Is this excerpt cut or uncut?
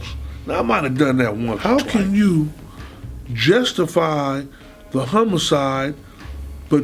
cut